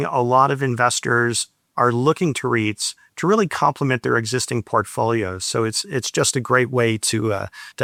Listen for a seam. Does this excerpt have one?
no; 0 cuts

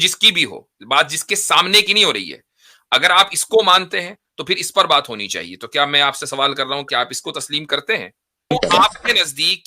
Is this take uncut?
no; 1 cut; at 8.5 s

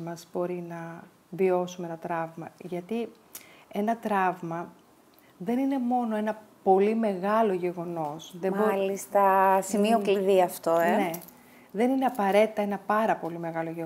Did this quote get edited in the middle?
no; 0 cuts

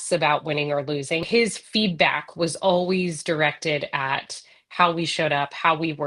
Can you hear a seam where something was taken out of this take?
yes; 1 cut; at 1.2 s

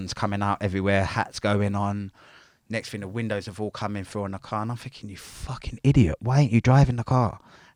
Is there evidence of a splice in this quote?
no; 0 cuts

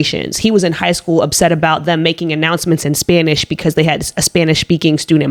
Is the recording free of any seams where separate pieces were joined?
yes; 0 cuts

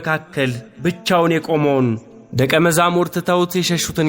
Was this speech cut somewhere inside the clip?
no; 0 cuts

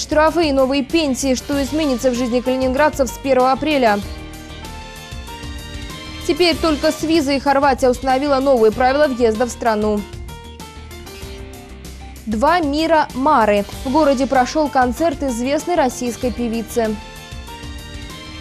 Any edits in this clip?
no; 0 cuts

